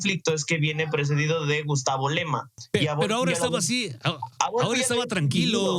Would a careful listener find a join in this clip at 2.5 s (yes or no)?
yes